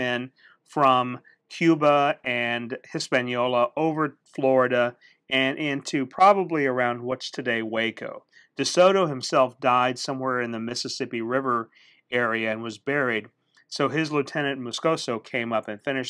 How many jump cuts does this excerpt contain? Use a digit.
1